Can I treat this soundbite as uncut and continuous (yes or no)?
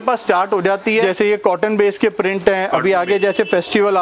no